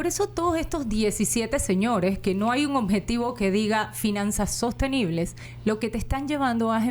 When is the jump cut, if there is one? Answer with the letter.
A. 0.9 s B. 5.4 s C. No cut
B